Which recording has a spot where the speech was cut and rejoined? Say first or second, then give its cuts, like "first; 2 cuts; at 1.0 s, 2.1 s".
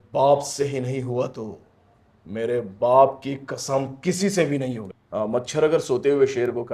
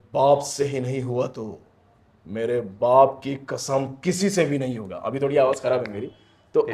first; 1 cut; at 4.9 s